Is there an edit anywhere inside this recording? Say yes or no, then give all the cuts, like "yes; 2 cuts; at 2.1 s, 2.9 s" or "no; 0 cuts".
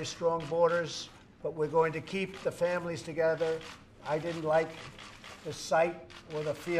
no; 0 cuts